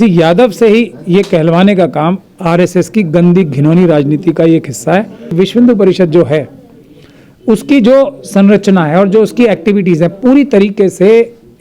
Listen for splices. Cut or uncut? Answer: cut